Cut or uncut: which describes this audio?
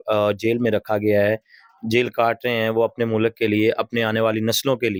uncut